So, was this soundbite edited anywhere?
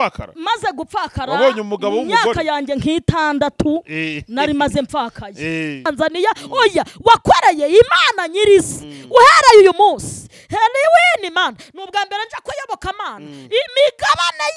yes; 1 cut; at 5.8 s

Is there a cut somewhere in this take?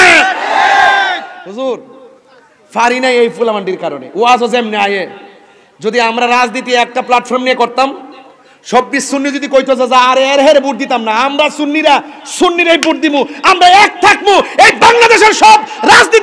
yes; 1 cut; at 1.4 s

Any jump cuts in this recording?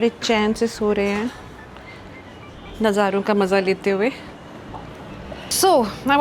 no; 0 cuts

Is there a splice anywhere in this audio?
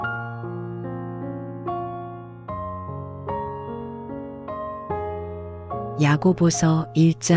yes; 1 cut; at 6.0 s

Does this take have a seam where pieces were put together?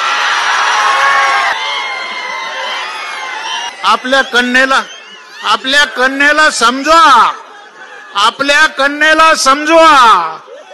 yes; 2 cuts; at 1.5 s, 3.7 s

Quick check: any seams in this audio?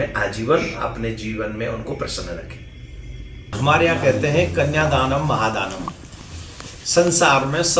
yes; 1 cut; at 3.4 s

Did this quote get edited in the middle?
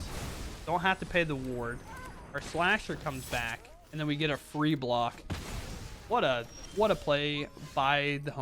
no; 0 cuts

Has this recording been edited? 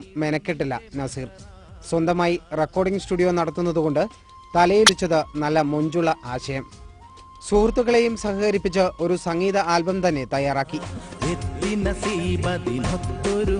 yes; 1 cut; at 4.9 s

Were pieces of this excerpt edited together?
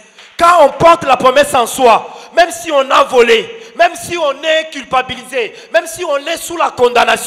no; 0 cuts

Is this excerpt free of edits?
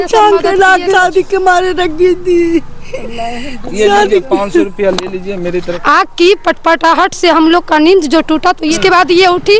no; 3 cuts; at 0.9 s, 5.7 s, 8.8 s

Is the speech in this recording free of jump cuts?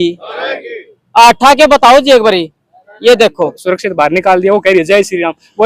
no; 1 cut; at 3.6 s

